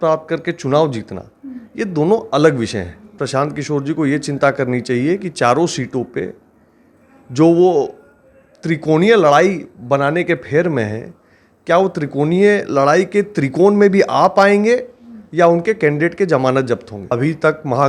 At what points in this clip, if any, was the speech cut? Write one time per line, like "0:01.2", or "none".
0:03.1
0:16.9